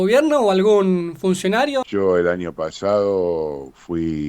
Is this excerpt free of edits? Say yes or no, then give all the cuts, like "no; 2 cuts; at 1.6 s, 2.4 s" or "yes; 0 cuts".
no; 1 cut; at 1.9 s